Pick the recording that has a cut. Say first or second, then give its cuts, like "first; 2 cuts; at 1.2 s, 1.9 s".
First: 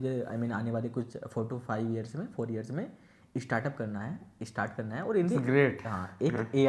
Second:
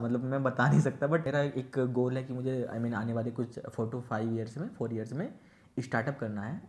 second; 1 cut; at 1.3 s